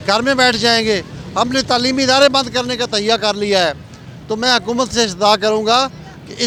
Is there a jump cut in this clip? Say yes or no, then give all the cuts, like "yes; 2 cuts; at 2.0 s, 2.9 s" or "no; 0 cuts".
no; 0 cuts